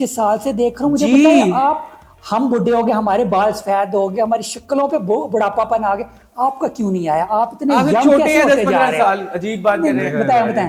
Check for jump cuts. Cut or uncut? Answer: uncut